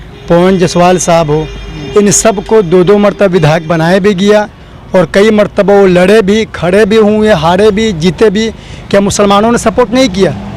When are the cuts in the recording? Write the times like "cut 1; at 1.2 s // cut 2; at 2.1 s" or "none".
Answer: none